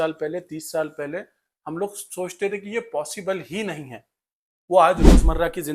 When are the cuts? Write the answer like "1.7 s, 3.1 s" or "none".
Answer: none